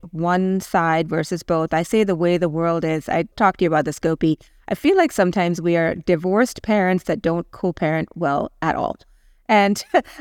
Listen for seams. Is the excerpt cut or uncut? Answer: uncut